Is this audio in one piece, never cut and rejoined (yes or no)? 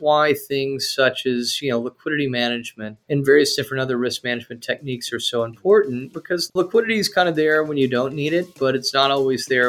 no